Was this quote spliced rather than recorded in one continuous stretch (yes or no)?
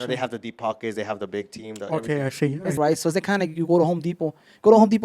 yes